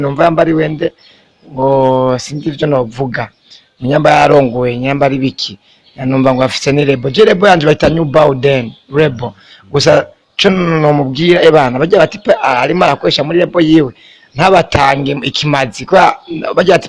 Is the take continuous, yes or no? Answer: yes